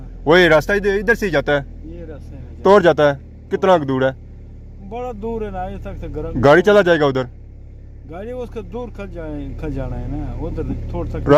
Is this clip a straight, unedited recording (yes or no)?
yes